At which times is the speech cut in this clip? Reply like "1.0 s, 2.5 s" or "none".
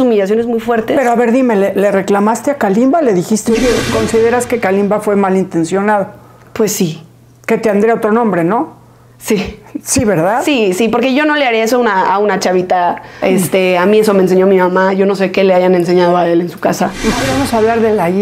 3.9 s, 13.2 s, 17.2 s